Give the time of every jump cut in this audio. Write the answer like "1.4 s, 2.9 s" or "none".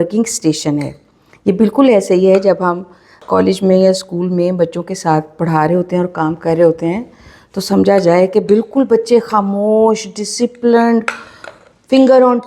3.2 s